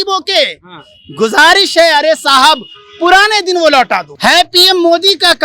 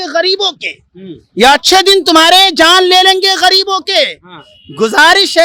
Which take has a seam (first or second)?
first